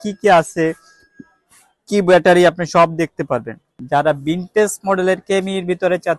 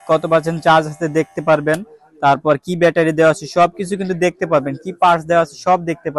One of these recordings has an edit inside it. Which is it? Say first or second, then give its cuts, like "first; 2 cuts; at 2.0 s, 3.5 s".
first; 1 cut; at 3.7 s